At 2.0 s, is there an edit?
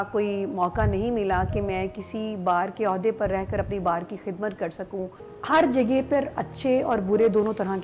no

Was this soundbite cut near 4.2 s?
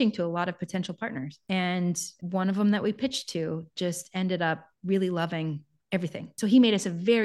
no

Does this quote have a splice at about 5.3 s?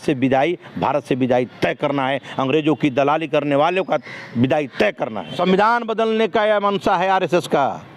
yes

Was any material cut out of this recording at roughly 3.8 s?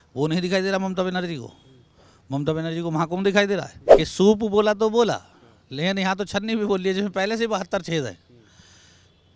yes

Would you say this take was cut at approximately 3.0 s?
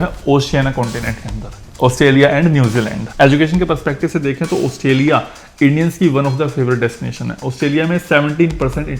yes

